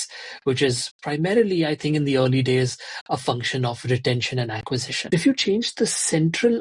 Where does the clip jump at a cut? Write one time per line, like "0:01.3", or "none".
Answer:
0:04.9

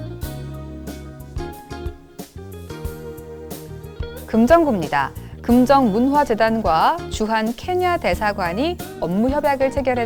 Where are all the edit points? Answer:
none

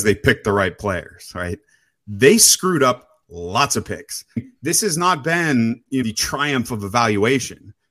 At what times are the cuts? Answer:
0:04.4
0:06.0

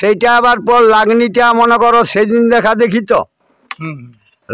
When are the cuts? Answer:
none

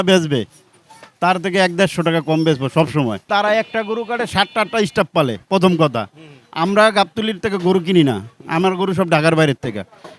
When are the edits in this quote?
0:03.2

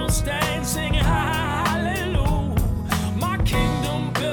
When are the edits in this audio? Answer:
none

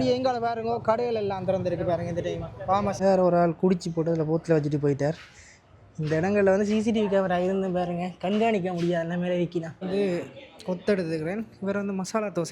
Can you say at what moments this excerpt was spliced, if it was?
0:03.0
0:09.7

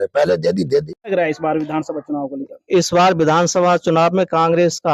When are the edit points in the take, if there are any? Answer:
0:01.1

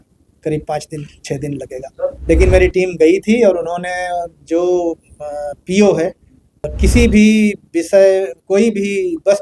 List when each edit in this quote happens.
0:02.2
0:06.7

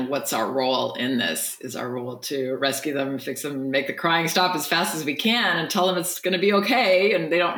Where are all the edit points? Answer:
none

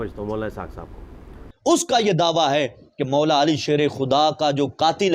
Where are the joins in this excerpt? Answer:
0:01.3

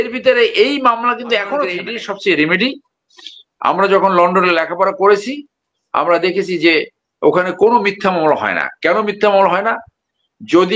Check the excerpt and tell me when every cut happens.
0:01.9

